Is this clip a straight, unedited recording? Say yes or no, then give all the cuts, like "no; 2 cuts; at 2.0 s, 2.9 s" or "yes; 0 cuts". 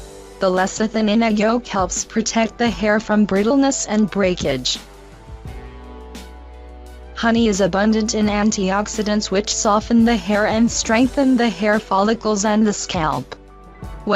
no; 1 cut; at 13.0 s